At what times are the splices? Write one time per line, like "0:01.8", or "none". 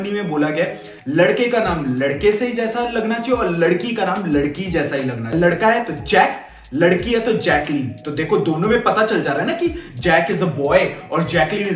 none